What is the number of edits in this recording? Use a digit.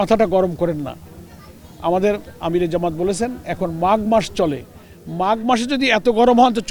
0